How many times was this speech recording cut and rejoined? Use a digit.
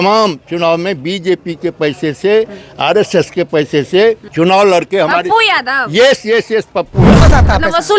2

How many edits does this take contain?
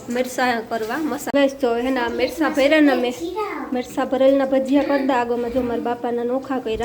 1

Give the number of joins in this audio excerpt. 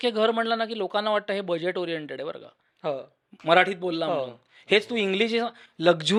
0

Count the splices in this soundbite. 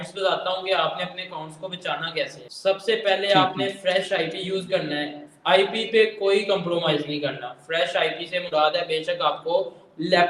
0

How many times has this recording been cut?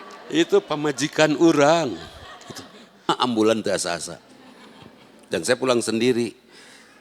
1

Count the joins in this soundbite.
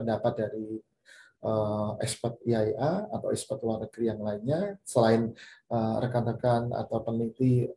0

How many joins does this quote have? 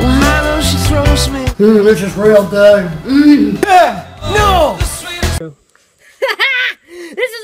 1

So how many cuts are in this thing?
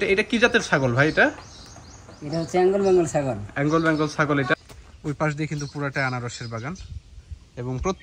1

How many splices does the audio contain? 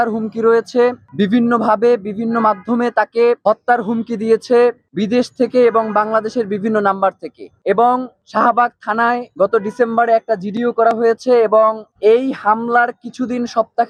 0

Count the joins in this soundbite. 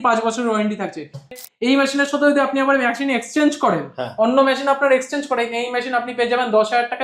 1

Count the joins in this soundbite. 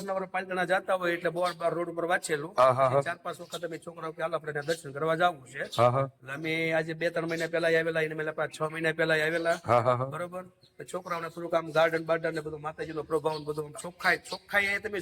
0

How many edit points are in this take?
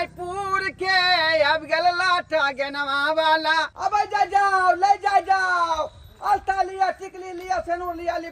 1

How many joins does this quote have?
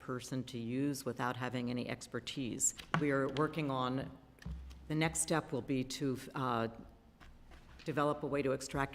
1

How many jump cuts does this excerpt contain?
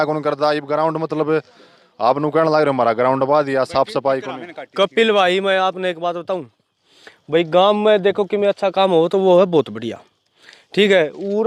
0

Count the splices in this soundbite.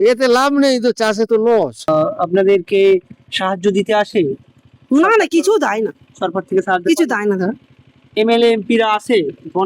1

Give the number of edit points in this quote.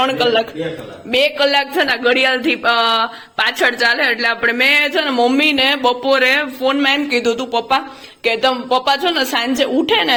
0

